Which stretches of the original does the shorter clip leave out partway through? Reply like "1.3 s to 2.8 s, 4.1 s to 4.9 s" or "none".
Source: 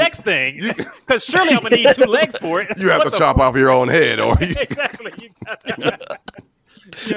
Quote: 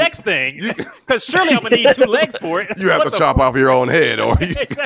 none